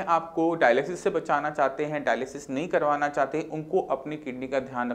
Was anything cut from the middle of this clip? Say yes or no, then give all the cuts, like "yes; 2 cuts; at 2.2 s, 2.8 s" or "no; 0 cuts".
no; 0 cuts